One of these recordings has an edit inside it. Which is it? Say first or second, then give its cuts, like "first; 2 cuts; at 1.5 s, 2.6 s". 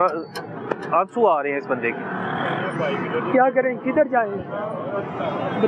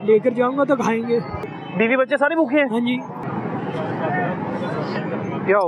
second; 2 cuts; at 1.5 s, 3.2 s